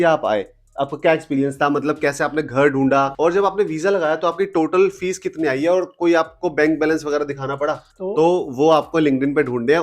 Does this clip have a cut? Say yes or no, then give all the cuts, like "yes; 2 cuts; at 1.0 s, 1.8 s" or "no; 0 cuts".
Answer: yes; 2 cuts; at 3.1 s, 7.9 s